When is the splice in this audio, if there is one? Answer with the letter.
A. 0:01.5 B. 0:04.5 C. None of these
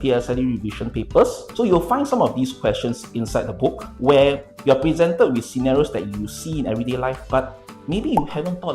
A